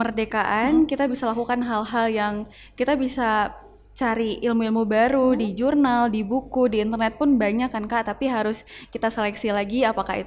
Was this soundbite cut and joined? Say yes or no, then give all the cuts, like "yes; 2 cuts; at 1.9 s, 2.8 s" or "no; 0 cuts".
no; 0 cuts